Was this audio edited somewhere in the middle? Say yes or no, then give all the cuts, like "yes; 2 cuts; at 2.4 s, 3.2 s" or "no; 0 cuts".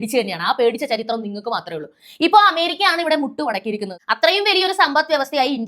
yes; 1 cut; at 3.9 s